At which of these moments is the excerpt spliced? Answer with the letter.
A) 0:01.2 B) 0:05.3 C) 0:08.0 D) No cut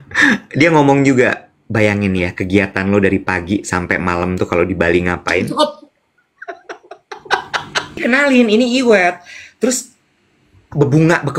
C